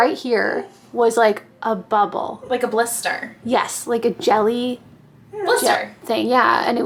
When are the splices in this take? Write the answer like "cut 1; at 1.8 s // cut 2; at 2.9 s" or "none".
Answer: none